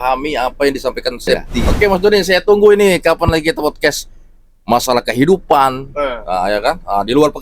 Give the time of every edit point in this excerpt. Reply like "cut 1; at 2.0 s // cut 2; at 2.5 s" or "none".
cut 1; at 1.7 s